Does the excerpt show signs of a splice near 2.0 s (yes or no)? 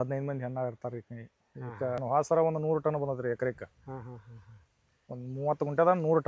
yes